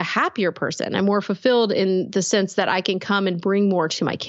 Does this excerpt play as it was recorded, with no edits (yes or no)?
yes